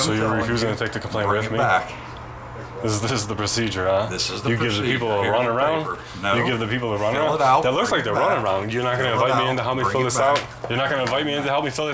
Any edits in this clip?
no; 0 cuts

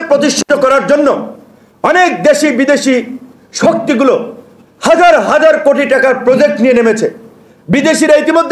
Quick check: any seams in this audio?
no; 0 cuts

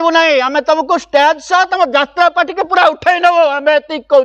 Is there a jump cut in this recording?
no; 0 cuts

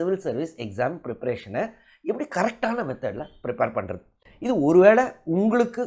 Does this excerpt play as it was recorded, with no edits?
yes; 0 cuts

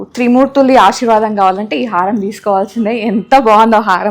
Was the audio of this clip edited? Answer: no; 0 cuts

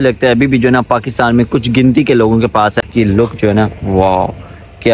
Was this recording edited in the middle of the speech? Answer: yes; 1 cut; at 2.8 s

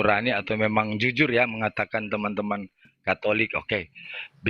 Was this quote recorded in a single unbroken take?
yes; 0 cuts

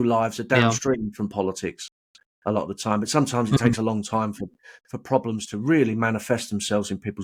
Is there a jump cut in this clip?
no; 0 cuts

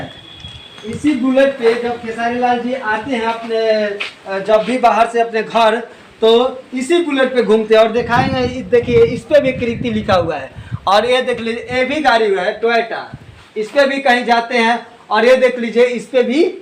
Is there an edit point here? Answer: no; 0 cuts

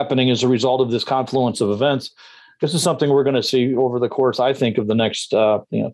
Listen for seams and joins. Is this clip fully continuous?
yes; 0 cuts

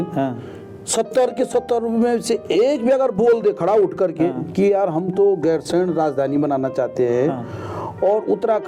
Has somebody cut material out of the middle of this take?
no; 0 cuts

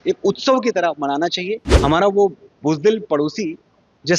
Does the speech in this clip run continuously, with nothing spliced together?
no; 1 cut; at 1.6 s

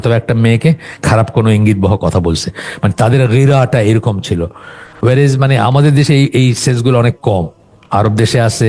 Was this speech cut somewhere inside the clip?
no; 0 cuts

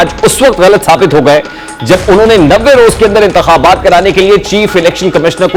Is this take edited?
no; 0 cuts

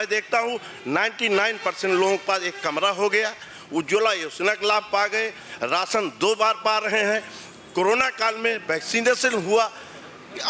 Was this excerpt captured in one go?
yes; 0 cuts

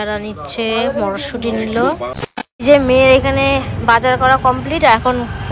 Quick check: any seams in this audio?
yes; 1 cut; at 2.6 s

